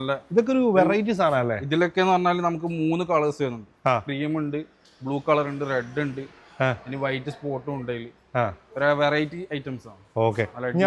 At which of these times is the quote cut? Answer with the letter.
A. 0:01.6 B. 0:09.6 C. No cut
C